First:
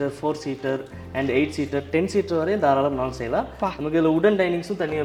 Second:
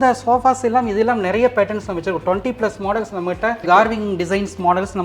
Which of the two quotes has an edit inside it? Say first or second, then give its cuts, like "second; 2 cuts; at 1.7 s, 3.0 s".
second; 1 cut; at 3.6 s